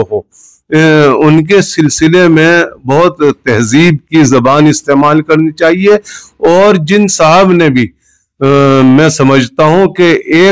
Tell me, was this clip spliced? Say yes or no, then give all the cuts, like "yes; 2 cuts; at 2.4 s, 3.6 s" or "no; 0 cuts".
no; 0 cuts